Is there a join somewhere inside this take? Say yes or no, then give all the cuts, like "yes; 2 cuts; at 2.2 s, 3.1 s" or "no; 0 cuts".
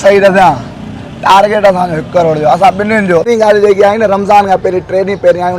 yes; 1 cut; at 3.3 s